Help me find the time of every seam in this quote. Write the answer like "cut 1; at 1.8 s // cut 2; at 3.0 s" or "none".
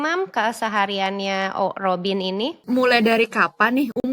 cut 1; at 2.6 s